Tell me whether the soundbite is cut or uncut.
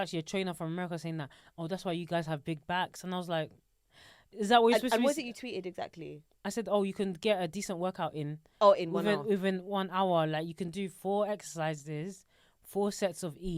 uncut